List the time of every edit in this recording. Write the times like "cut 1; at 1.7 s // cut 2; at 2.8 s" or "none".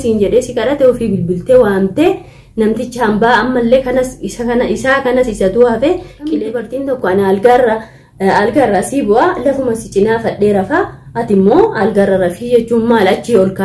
cut 1; at 6.4 s